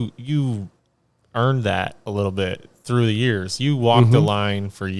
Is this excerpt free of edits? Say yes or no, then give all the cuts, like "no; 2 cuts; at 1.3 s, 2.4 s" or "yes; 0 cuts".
yes; 0 cuts